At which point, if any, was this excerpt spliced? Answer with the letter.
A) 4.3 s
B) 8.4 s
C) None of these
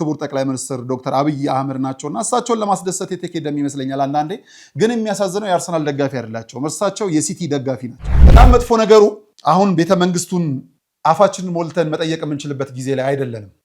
B